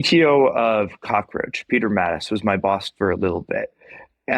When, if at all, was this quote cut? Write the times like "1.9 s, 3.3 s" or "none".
none